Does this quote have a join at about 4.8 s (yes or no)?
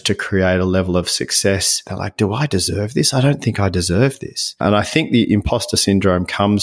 no